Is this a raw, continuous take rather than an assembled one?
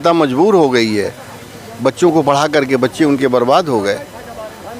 yes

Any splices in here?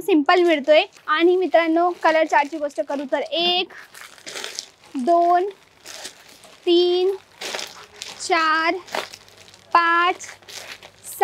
yes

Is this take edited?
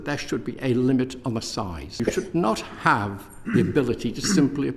yes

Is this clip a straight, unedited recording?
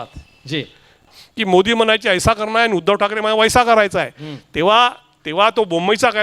no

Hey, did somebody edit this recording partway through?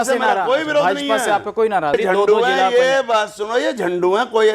yes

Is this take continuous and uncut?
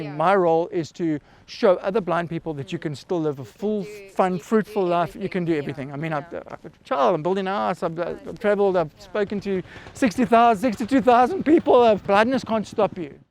no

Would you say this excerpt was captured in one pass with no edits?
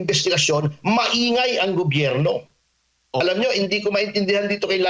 no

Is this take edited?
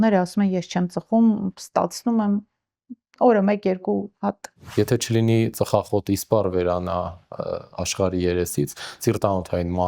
yes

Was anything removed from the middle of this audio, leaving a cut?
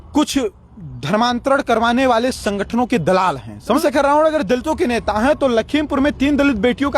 yes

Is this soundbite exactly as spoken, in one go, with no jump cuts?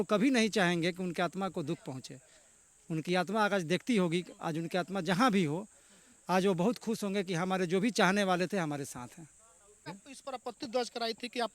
no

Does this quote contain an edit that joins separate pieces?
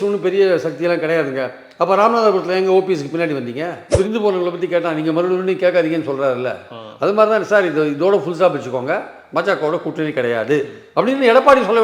yes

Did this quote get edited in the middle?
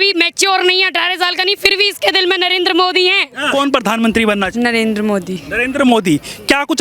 yes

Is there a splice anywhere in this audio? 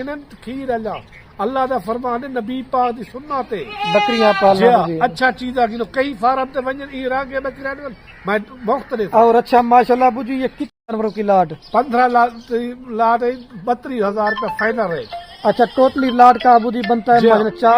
yes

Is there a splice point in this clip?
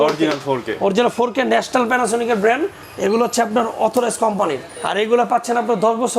no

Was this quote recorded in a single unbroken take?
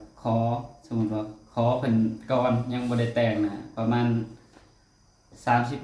yes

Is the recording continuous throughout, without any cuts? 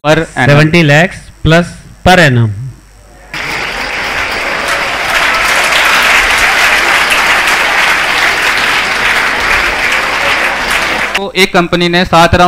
no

